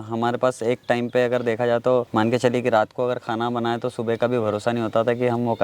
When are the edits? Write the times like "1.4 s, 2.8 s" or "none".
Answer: 2.1 s

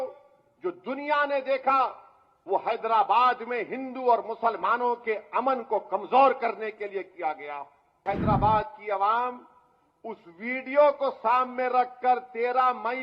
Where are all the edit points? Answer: 8.0 s

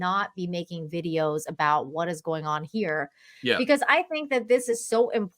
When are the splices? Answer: none

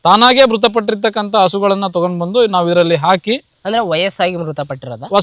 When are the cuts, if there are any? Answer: none

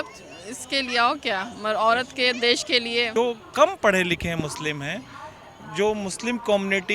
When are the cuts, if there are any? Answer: 3.1 s

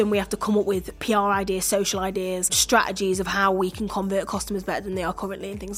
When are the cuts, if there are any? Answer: 0.9 s, 2.6 s

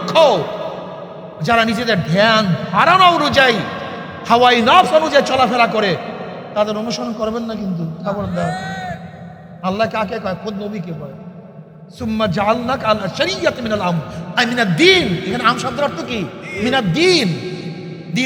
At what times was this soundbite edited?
none

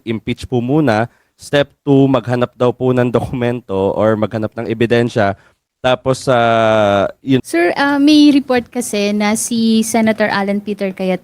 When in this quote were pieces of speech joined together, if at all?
7.4 s

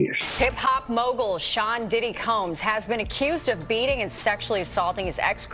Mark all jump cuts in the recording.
none

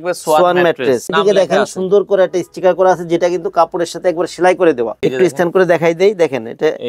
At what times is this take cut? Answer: 1.1 s, 5.0 s

